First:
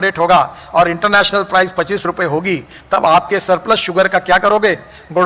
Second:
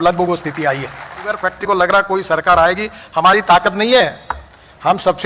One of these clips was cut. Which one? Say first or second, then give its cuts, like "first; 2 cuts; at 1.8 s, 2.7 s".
second; 1 cut; at 1.6 s